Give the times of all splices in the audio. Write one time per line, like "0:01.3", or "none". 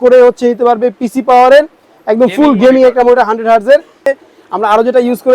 0:04.0